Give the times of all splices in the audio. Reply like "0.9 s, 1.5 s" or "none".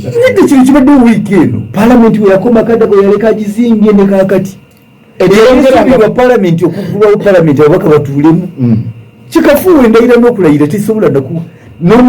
1.6 s